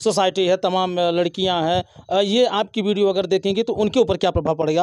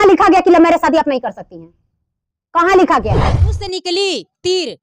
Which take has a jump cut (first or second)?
second